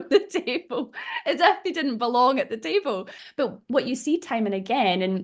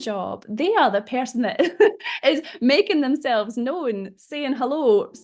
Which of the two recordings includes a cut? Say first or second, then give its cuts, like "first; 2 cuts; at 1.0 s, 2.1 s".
first; 1 cut; at 3.2 s